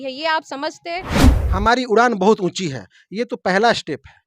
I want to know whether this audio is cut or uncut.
cut